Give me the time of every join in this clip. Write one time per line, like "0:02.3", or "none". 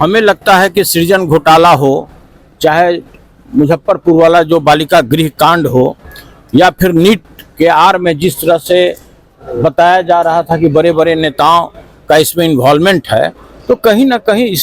none